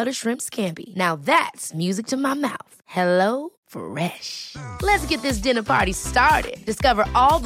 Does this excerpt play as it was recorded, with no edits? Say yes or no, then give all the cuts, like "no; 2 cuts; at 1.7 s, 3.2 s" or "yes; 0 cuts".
yes; 0 cuts